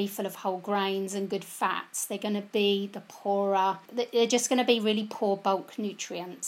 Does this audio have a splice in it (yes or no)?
yes